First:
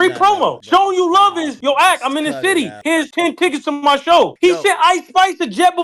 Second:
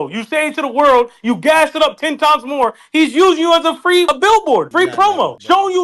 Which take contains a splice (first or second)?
first